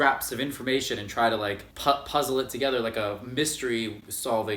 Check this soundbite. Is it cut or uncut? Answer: uncut